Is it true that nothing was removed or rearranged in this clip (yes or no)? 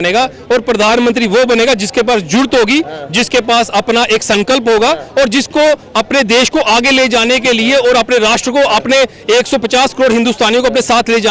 yes